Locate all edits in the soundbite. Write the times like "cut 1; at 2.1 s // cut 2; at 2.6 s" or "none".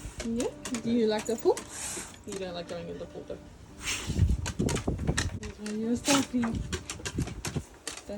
cut 1; at 5.4 s